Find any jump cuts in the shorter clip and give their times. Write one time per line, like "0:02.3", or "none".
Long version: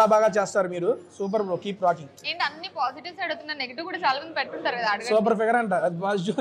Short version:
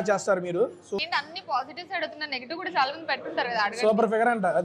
0:01.0